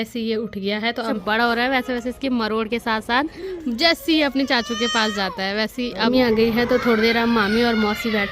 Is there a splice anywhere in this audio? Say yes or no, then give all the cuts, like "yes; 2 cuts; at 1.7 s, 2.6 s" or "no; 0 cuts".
yes; 3 cuts; at 1.1 s, 3.4 s, 6.1 s